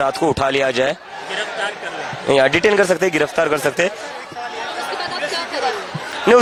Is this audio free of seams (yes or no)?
yes